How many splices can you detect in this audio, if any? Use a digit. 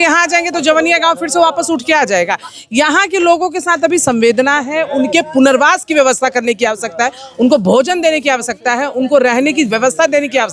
0